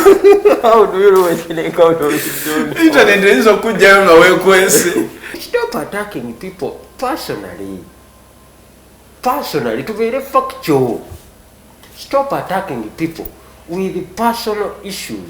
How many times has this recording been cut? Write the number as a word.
one